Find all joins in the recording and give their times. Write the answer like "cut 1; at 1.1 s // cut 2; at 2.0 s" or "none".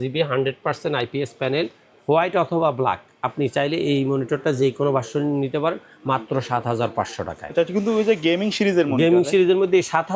none